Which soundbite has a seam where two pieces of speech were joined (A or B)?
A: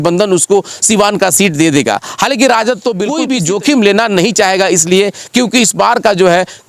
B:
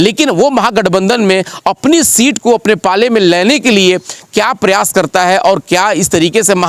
A